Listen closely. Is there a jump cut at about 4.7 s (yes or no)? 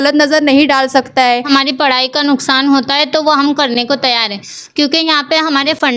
no